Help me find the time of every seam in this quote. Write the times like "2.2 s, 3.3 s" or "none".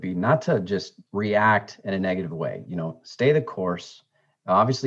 1.0 s